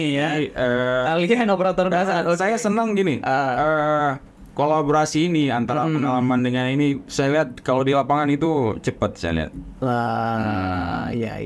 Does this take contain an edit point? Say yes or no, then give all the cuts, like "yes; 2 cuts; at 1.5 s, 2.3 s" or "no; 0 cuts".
no; 0 cuts